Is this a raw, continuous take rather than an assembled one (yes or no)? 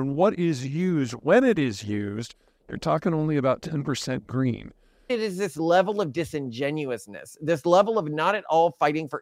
no